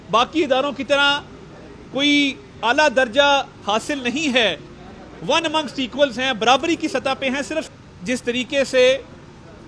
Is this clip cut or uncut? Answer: cut